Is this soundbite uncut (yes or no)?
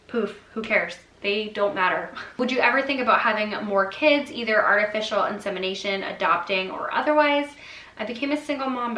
yes